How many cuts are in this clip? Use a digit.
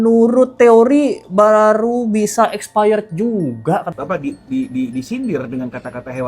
1